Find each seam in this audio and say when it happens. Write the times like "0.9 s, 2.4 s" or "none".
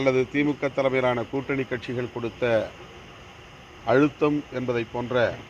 none